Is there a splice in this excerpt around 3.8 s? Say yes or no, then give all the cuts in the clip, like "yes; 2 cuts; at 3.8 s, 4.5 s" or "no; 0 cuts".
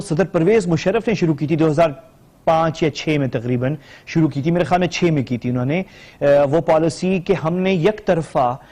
no; 1 cut; at 5.9 s